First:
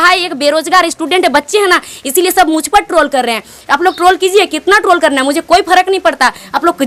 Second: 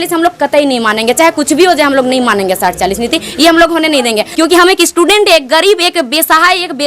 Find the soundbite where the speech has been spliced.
second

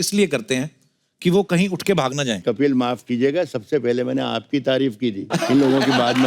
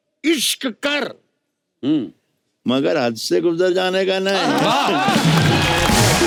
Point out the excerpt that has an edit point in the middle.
first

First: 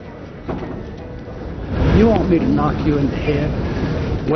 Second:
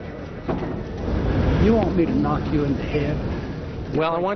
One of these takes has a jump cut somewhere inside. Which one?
second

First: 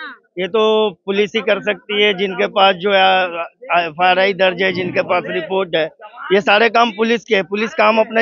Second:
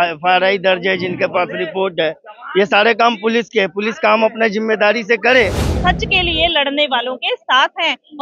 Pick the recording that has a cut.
second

